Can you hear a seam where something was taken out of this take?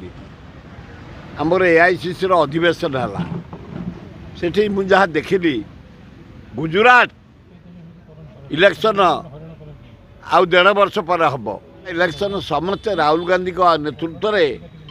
yes; 1 cut; at 11.9 s

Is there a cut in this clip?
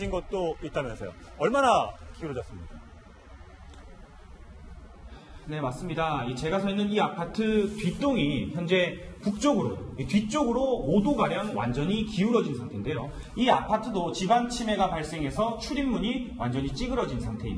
yes; 1 cut; at 7.8 s

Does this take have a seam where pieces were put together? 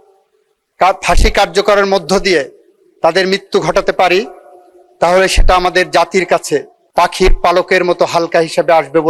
no; 0 cuts

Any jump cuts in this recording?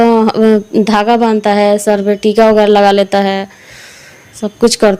no; 0 cuts

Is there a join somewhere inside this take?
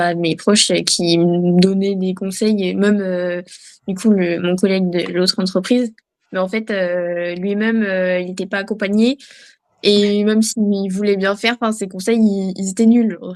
no; 0 cuts

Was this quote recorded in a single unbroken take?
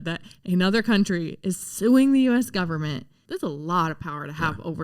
no; 1 cut; at 3.2 s

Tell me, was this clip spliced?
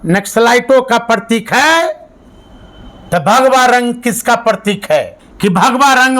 yes; 1 cut; at 5.2 s

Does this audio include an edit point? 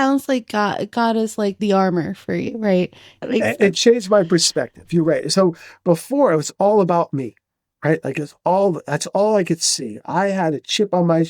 yes; 2 cuts; at 1.6 s, 3.2 s

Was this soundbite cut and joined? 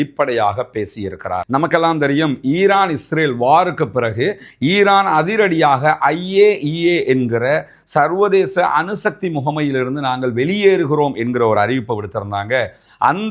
no; 0 cuts

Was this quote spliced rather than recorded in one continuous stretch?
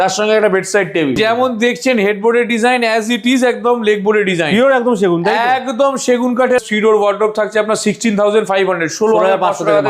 yes; 2 cuts; at 1.2 s, 6.6 s

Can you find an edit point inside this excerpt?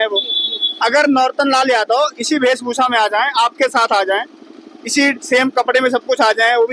no; 0 cuts

